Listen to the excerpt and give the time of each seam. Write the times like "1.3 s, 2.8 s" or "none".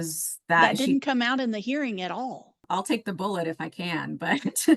2.6 s